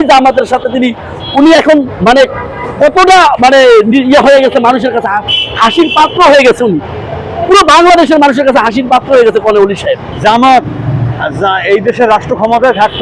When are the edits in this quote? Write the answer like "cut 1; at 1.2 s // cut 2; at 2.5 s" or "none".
none